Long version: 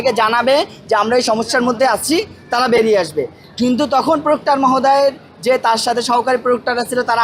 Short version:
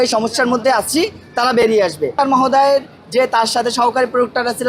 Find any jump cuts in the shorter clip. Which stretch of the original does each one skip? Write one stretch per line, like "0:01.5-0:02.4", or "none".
0:03.3-0:04.4